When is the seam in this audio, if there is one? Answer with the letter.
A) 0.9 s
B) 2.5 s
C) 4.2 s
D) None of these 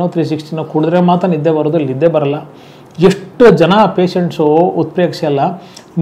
D